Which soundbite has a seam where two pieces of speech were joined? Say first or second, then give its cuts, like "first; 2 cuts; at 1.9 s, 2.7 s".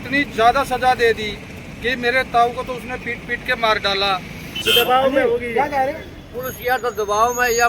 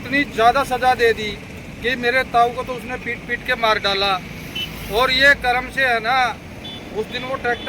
first; 1 cut; at 4.6 s